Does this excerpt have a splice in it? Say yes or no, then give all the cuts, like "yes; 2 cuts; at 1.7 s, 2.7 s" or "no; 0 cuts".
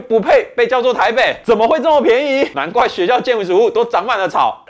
no; 0 cuts